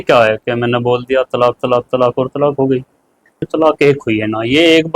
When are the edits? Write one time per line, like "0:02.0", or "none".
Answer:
0:03.5